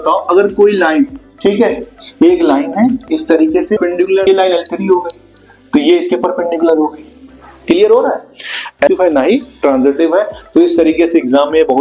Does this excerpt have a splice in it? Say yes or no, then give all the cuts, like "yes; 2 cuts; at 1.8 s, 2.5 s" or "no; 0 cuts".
yes; 2 cuts; at 4.3 s, 8.9 s